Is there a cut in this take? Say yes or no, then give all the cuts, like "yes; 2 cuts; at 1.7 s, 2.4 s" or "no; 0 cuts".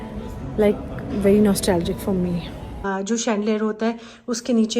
yes; 1 cut; at 2.8 s